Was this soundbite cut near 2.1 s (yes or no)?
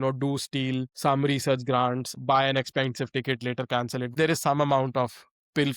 yes